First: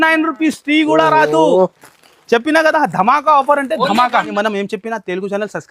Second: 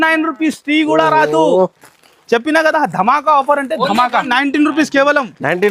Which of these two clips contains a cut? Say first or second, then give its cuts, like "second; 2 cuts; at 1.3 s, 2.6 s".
first; 1 cut; at 4.3 s